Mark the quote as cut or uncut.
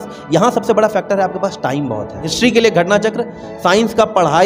cut